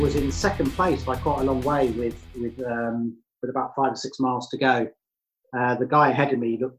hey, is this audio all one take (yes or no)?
yes